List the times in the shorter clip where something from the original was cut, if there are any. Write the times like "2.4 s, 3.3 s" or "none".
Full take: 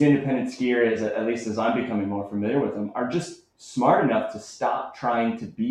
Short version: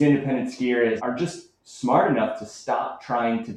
1.0 s